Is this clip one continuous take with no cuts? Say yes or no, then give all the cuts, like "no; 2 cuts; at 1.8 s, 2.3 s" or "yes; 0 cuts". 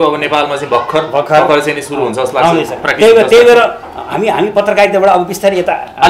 yes; 0 cuts